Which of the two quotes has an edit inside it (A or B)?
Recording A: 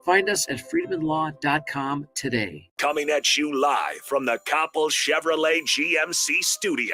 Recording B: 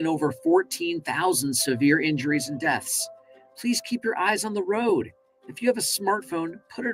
A